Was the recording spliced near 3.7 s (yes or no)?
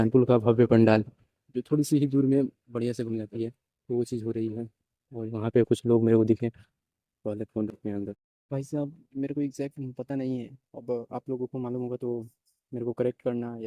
no